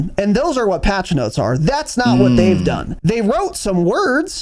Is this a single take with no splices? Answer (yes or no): no